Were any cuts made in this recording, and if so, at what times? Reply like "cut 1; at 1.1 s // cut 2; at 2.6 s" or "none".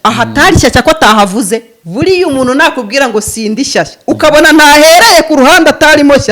cut 1; at 1.8 s